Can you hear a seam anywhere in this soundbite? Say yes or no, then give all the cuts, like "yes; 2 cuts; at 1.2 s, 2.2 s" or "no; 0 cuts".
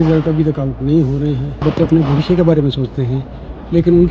yes; 1 cut; at 1.6 s